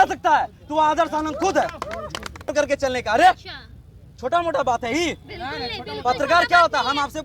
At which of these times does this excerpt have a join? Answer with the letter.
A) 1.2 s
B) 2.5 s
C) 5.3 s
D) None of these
B